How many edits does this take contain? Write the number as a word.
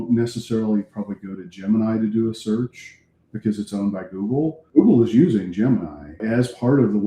two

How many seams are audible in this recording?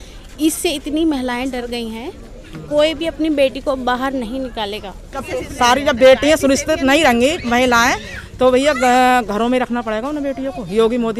one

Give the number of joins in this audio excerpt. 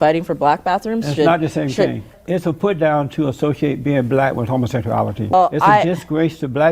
two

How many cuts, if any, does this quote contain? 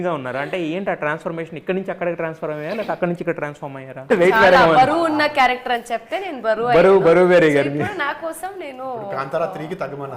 one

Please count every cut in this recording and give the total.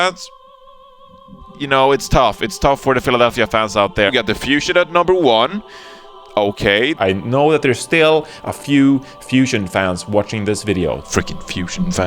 two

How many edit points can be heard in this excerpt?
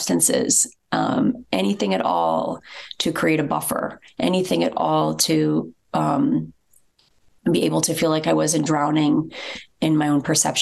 zero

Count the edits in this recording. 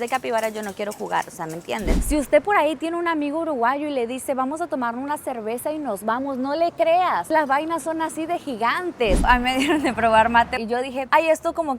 three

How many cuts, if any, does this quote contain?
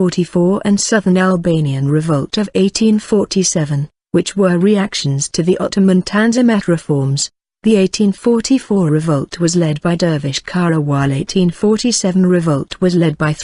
one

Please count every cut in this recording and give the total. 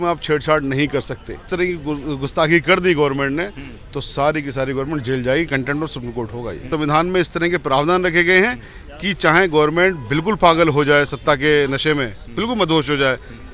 two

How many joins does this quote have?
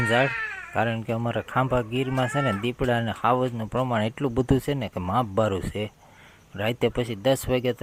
zero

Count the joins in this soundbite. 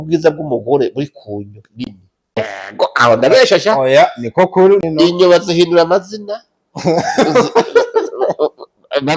two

